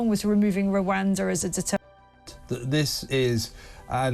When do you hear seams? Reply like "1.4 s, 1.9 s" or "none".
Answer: 2.0 s